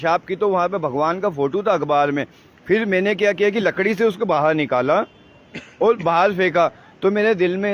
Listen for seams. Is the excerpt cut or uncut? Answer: uncut